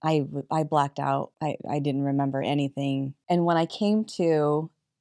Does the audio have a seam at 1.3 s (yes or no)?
yes